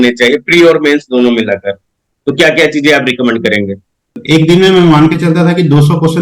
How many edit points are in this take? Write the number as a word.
one